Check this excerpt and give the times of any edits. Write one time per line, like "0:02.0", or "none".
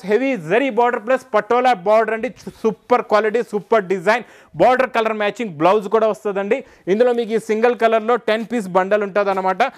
none